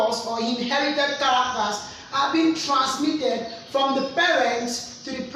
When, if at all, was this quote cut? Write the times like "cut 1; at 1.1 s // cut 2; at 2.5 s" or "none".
none